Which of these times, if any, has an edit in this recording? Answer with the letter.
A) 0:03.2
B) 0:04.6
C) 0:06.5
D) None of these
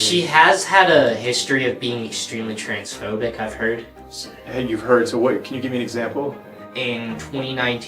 C